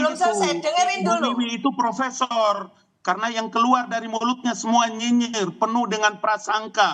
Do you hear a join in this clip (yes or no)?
no